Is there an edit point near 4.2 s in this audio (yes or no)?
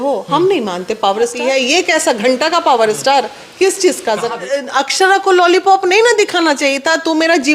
yes